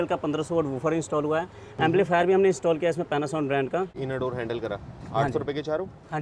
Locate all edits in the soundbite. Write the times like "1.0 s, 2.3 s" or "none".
4.0 s